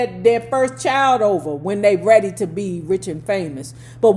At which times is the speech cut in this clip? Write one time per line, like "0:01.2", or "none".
none

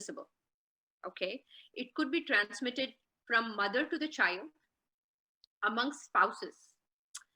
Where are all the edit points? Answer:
none

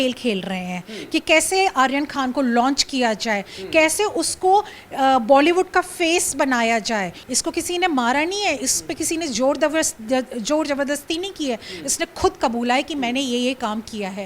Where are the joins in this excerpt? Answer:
0:07.2

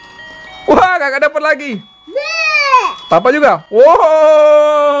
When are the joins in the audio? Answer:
none

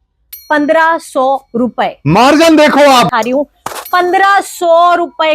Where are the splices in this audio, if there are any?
0:03.1

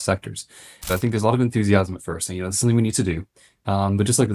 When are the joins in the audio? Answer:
0:00.9

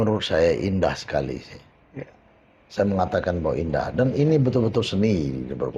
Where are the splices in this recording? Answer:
none

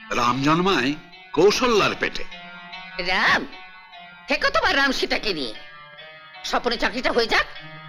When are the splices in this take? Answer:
none

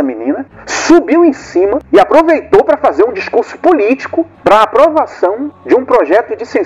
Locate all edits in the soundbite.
none

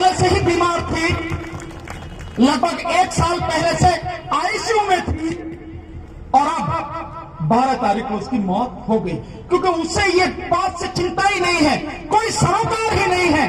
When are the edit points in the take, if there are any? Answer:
none

